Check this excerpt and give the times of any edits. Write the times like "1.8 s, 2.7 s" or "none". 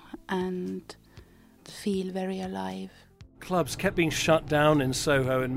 1.6 s, 3.4 s